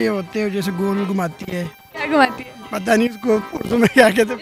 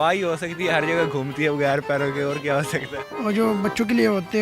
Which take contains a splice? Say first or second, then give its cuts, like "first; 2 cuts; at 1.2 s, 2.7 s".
second; 1 cut; at 2.9 s